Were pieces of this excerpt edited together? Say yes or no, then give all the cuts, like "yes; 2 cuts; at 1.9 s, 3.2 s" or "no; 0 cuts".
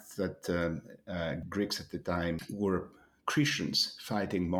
yes; 2 cuts; at 1.4 s, 2.5 s